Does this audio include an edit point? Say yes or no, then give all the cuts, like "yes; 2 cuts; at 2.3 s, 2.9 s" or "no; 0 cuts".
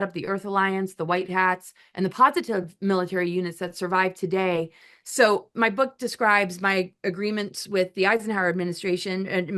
yes; 1 cut; at 4.8 s